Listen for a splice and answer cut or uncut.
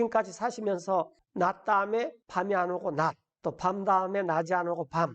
cut